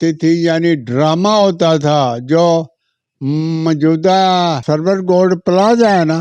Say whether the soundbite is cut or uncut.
cut